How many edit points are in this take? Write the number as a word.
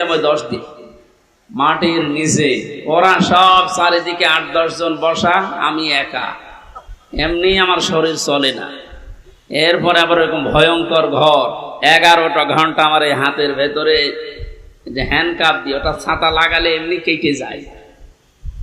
one